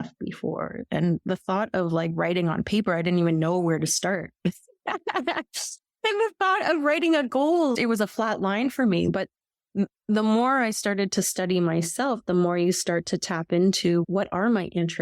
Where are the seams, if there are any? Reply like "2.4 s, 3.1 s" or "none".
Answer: 7.7 s, 9.1 s, 14.1 s